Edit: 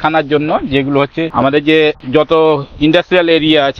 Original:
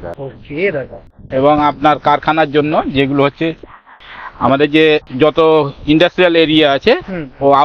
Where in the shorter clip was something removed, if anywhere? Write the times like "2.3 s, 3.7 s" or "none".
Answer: 1.3 s

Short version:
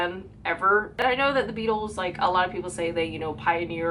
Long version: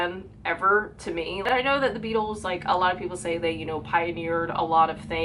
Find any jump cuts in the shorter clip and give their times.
0.9 s

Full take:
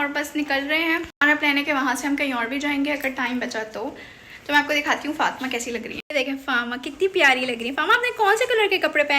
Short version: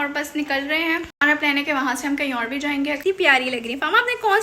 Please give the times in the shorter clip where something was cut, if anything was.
3.0 s

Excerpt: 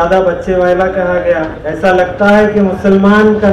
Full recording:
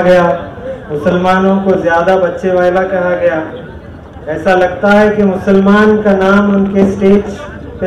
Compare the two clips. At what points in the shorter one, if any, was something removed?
1.6 s

